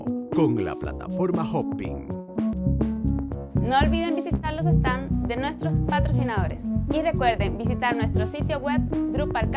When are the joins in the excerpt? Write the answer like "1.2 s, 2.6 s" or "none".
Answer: 2.6 s